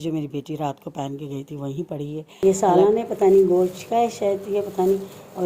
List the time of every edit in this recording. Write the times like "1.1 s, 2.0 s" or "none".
2.4 s

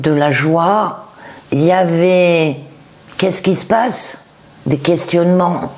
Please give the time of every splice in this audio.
none

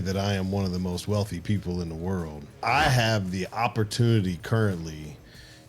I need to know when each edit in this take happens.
2.5 s

